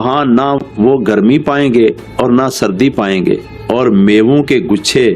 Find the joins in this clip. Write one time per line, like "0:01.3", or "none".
0:03.5